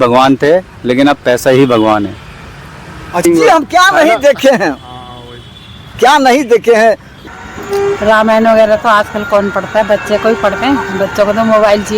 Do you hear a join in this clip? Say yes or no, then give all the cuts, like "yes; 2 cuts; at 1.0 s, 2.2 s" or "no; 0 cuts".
yes; 2 cuts; at 3.2 s, 7.1 s